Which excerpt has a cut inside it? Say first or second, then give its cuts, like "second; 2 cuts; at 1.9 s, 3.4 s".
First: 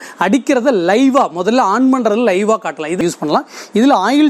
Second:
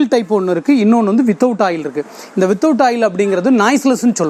first; 1 cut; at 3.0 s